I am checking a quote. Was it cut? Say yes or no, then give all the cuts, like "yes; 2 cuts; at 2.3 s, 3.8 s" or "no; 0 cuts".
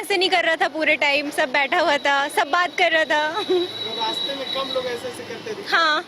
no; 0 cuts